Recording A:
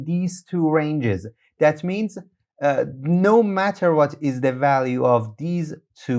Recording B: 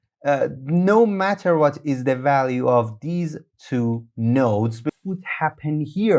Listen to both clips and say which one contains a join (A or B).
B